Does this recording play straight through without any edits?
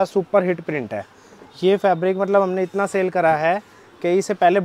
yes; 0 cuts

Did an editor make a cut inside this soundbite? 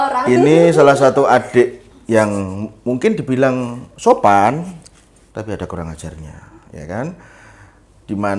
no; 0 cuts

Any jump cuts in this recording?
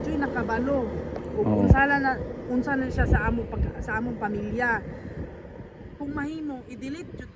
no; 0 cuts

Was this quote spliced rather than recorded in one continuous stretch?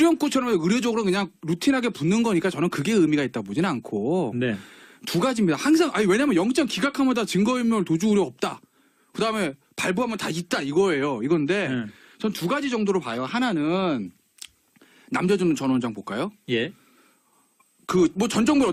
no; 0 cuts

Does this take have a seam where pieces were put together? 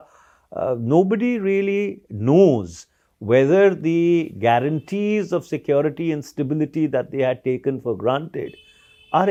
no; 0 cuts

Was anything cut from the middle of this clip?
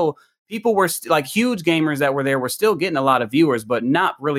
no; 0 cuts

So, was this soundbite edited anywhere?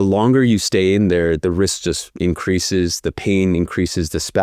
no; 0 cuts

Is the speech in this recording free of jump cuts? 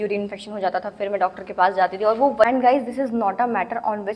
no; 1 cut; at 2.5 s

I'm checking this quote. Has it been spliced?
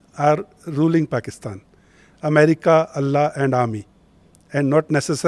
no; 0 cuts

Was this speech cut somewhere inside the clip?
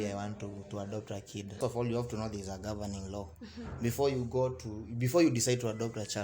yes; 1 cut; at 1.6 s

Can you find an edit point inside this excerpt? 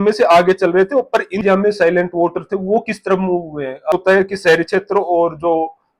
yes; 2 cuts; at 1.4 s, 3.9 s

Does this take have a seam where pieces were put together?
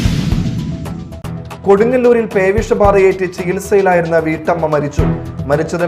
yes; 1 cut; at 1.1 s

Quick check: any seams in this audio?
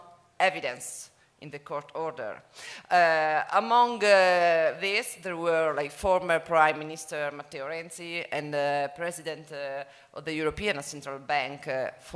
no; 0 cuts

